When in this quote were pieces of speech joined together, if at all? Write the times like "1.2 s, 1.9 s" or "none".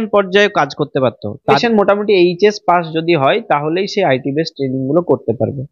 1.5 s